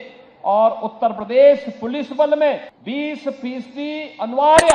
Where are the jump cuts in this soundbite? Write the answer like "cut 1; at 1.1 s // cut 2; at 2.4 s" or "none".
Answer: cut 1; at 2.7 s